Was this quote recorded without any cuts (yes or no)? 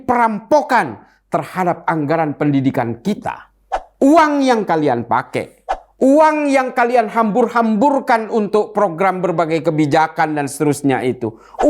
no